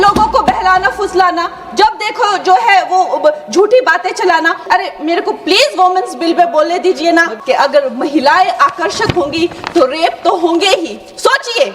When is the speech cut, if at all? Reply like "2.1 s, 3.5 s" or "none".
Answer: 4.6 s, 7.3 s